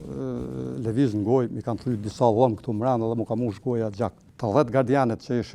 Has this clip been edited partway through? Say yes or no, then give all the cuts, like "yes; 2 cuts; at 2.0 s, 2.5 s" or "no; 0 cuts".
yes; 1 cut; at 4.3 s